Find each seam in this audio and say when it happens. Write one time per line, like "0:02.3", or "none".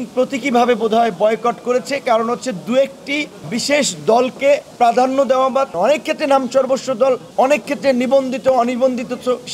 0:03.4
0:04.7
0:05.7
0:07.3